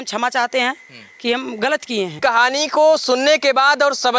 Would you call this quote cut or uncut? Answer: cut